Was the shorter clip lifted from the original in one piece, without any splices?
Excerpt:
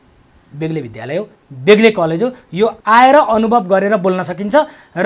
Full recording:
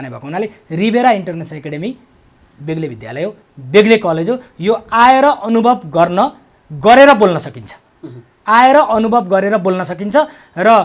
no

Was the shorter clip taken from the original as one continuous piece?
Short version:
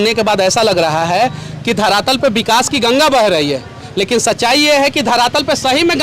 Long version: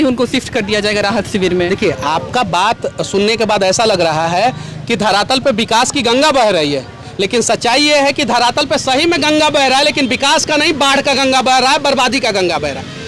yes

